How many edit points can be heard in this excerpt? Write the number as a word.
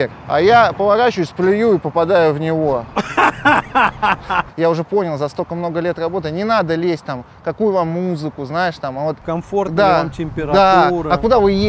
two